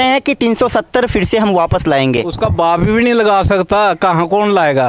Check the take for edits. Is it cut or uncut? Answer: uncut